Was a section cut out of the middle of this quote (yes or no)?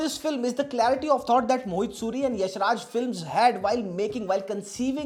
no